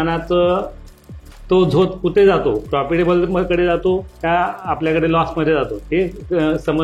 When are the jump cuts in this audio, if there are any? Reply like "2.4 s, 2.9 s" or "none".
none